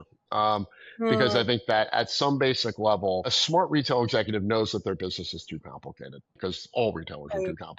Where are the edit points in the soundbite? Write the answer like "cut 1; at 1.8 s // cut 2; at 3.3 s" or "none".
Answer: cut 1; at 3.3 s // cut 2; at 6.4 s